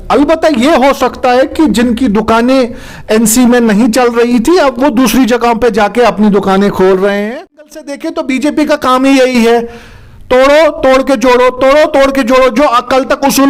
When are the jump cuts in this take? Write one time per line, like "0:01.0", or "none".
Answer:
0:07.8